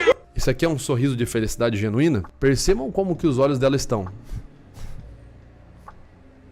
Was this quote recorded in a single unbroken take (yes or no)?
yes